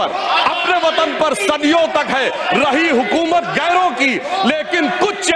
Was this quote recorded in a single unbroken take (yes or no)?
yes